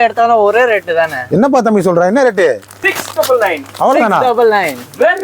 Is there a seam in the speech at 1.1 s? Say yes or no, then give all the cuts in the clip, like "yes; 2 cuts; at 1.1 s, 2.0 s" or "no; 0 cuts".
no; 1 cut; at 2.7 s